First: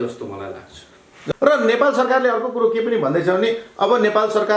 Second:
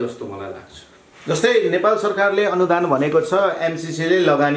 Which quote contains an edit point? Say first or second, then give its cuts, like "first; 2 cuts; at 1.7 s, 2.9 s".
first; 1 cut; at 1.2 s